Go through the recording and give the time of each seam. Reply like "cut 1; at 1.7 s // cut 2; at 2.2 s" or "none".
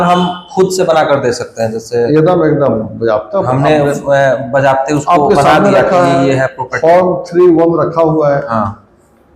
none

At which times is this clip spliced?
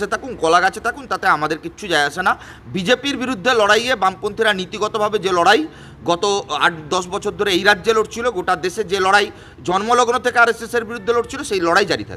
none

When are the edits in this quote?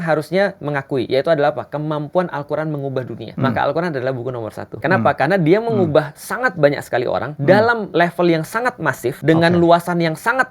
cut 1; at 3.2 s // cut 2; at 4.8 s // cut 3; at 7.3 s // cut 4; at 7.8 s // cut 5; at 9.2 s

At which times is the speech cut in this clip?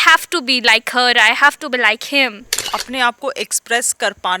cut 1; at 2.7 s

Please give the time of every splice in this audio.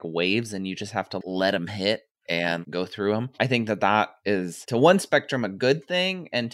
cut 1; at 1.2 s // cut 2; at 2.6 s

